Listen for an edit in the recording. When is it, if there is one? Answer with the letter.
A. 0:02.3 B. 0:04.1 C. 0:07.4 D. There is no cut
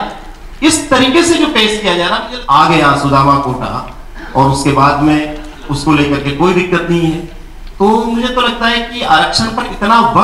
A